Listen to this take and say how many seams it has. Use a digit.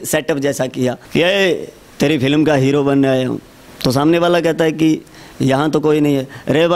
1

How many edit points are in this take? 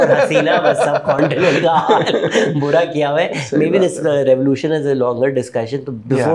0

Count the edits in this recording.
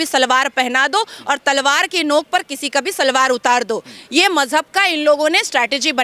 0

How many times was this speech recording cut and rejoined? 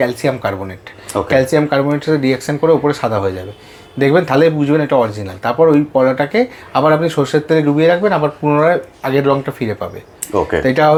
0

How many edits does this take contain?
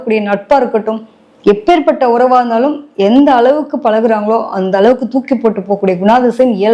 0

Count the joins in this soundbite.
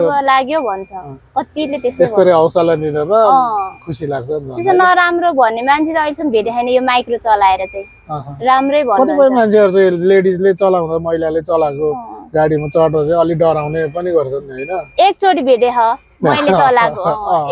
0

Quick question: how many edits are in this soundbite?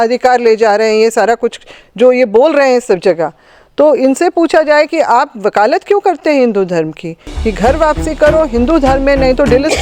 0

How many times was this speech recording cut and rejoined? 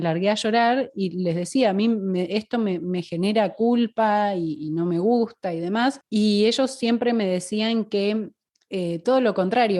1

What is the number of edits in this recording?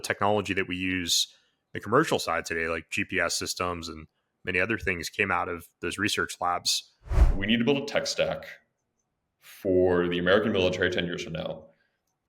1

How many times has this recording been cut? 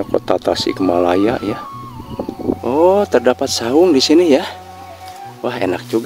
1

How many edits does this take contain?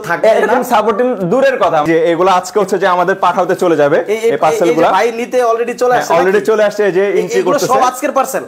1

